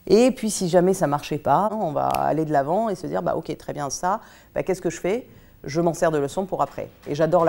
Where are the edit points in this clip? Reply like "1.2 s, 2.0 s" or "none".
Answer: 1.7 s